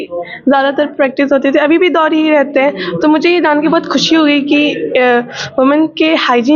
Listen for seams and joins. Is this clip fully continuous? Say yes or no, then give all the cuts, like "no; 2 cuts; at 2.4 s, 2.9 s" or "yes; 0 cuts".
yes; 0 cuts